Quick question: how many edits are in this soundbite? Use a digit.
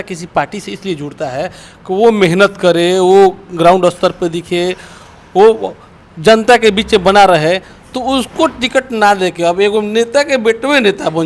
0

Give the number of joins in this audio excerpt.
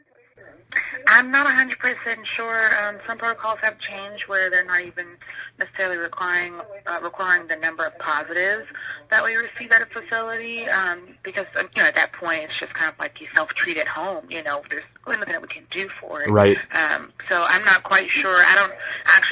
0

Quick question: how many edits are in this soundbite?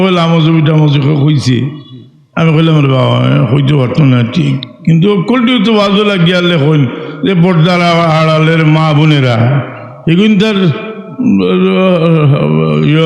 0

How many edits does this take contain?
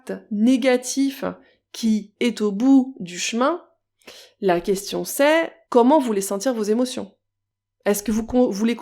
2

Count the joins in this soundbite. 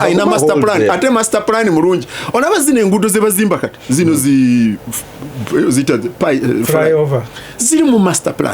0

